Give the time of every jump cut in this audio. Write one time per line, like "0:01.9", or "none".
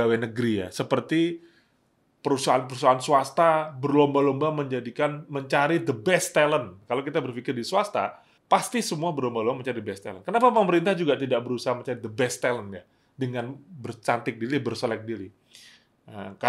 0:06.8
0:08.3